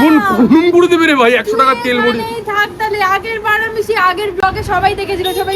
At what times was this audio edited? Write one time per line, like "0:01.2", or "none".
none